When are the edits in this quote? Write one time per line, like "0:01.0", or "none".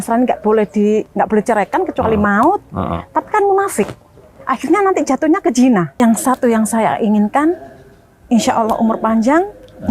0:05.9